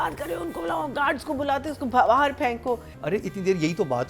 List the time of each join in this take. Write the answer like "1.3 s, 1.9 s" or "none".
2.9 s